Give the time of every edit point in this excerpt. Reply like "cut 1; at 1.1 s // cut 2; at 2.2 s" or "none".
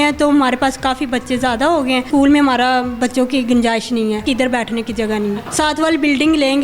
cut 1; at 2.1 s // cut 2; at 4.2 s // cut 3; at 5.5 s